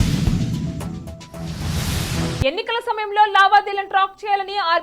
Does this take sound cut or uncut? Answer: cut